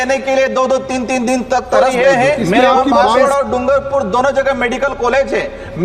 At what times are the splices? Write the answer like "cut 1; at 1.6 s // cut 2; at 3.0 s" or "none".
cut 1; at 3.2 s